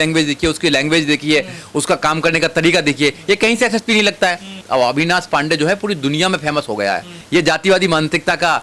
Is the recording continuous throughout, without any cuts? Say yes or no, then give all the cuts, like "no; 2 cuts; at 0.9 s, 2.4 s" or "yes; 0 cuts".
no; 1 cut; at 4.6 s